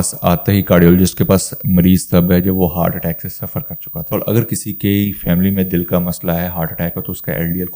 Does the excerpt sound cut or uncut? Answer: cut